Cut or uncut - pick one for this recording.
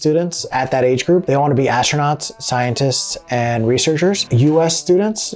cut